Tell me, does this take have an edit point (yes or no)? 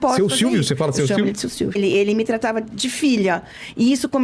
yes